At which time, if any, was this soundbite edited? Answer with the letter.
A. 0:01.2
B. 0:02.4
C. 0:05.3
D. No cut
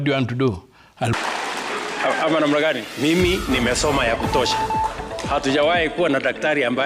A